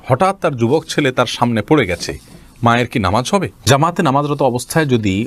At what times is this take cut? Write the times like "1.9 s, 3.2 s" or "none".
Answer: 3.6 s

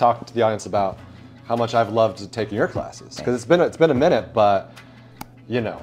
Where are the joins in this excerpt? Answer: none

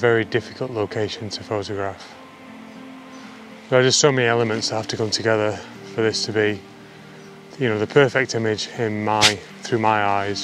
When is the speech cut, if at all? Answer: none

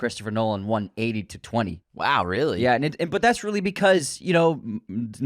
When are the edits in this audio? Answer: 1.8 s

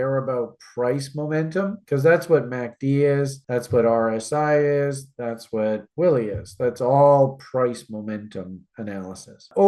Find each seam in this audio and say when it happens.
none

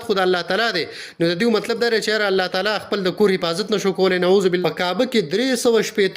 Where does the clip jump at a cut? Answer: 4.6 s

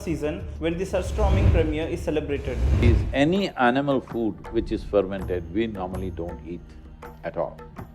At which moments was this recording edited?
2.8 s

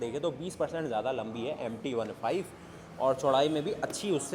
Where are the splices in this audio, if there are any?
none

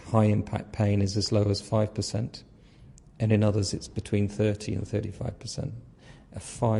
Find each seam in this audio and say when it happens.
none

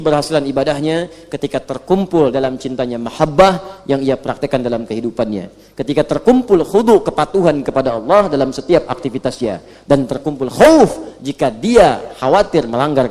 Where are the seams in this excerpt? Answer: none

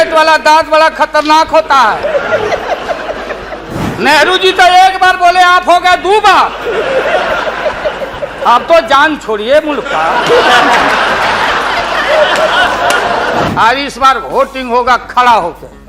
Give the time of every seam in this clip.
3.8 s, 13.5 s

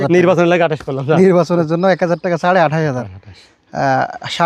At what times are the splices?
none

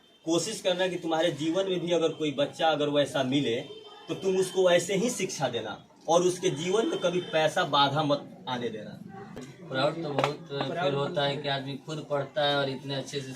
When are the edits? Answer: 9.4 s

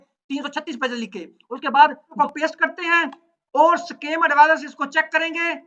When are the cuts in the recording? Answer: 2.0 s

